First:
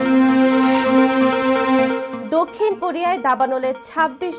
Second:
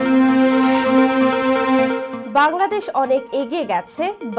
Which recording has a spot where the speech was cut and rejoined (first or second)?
second